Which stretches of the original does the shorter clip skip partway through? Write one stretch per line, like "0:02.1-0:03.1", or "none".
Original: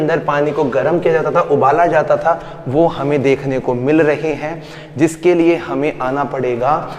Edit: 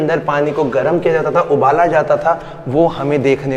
none